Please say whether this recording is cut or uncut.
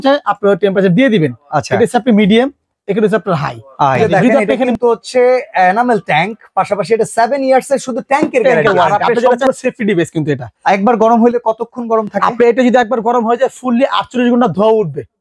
cut